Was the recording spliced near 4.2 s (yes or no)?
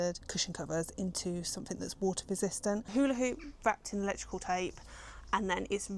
no